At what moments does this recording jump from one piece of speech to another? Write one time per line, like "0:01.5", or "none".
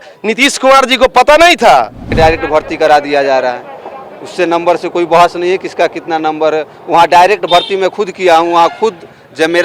0:02.1